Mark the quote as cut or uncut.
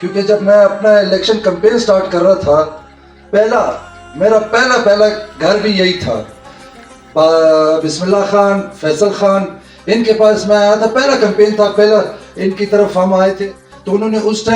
cut